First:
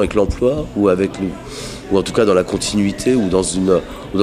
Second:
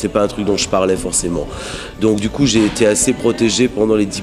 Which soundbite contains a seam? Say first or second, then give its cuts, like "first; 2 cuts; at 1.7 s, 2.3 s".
second; 1 cut; at 1.2 s